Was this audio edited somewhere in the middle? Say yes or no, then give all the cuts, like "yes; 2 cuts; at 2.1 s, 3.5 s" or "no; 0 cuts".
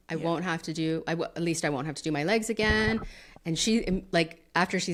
no; 0 cuts